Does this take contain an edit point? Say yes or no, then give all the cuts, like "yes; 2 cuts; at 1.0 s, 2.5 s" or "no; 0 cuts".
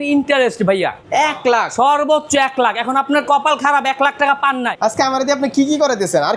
yes; 2 cuts; at 1.0 s, 4.7 s